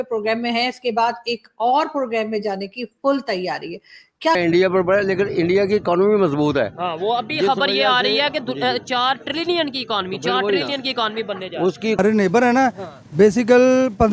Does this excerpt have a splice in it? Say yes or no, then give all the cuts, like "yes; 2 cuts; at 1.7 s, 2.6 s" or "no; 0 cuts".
yes; 2 cuts; at 4.4 s, 12.0 s